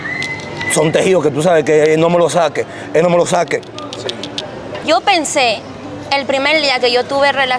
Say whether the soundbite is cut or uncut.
cut